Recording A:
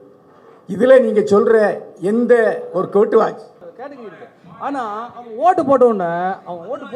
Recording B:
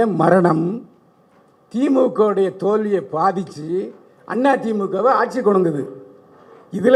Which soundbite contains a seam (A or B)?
A